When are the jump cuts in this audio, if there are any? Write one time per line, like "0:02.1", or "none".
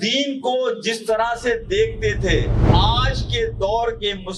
0:02.6